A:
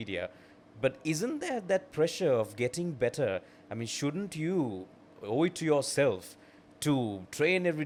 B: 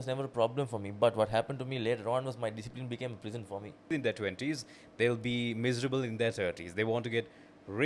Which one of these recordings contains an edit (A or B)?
B